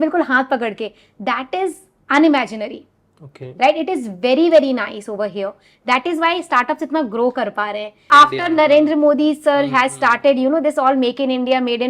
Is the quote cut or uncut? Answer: cut